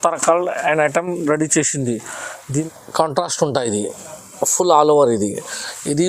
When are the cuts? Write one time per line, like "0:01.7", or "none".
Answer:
0:02.6